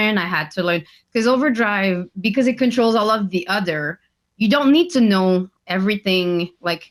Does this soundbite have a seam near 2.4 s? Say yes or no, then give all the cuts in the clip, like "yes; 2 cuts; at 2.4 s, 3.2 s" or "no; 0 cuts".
no; 0 cuts